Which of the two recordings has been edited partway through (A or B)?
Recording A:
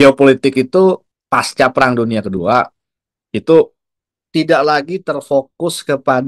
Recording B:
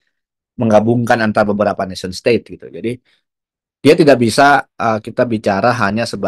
A